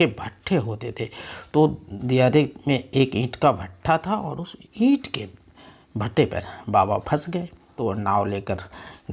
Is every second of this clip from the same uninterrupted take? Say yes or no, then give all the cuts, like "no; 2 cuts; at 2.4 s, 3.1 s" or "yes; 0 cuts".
no; 2 cuts; at 1.9 s, 7.7 s